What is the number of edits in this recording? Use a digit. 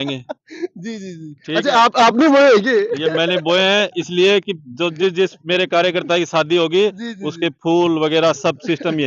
0